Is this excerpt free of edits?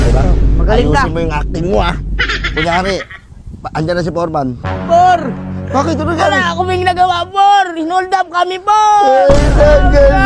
yes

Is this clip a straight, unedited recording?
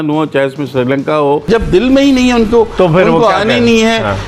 no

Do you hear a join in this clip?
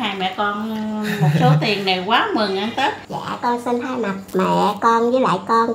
yes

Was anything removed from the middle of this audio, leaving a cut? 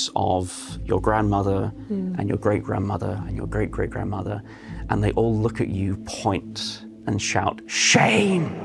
no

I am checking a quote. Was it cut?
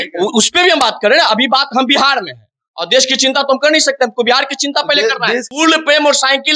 yes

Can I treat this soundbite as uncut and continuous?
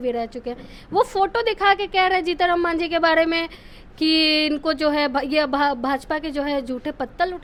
yes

